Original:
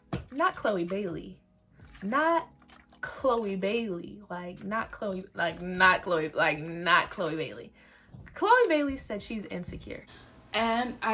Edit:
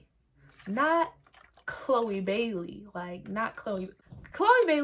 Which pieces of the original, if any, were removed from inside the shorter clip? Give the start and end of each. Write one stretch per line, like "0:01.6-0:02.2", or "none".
0:05.3-0:07.9